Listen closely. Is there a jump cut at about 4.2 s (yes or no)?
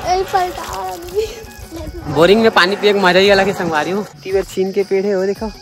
yes